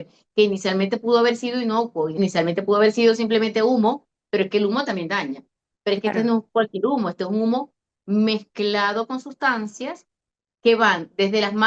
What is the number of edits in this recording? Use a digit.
1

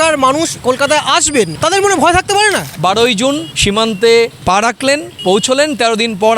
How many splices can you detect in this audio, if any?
2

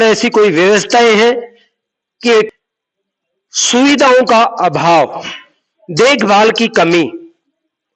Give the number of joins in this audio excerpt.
1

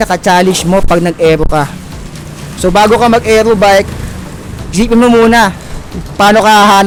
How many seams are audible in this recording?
0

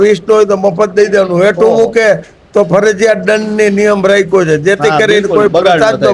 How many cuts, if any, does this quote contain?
0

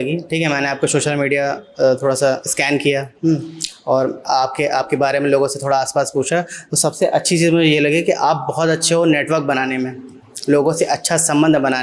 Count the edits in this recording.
0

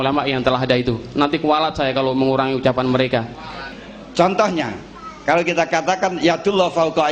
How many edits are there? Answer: 1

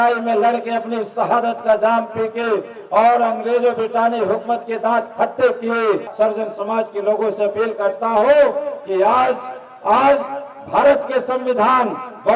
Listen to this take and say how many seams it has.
1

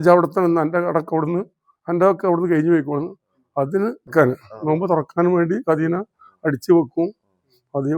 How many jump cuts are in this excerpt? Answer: 1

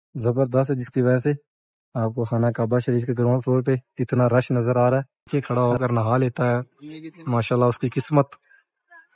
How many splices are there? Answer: 1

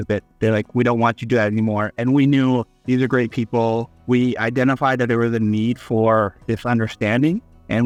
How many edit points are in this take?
0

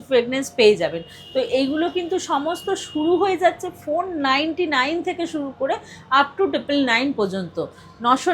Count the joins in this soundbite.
0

